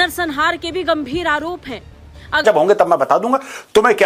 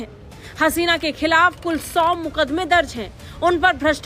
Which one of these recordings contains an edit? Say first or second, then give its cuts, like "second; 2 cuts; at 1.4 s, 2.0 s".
first; 1 cut; at 2.4 s